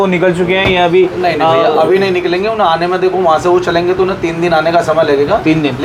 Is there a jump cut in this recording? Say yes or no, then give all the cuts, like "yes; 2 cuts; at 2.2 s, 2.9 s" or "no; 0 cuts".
no; 0 cuts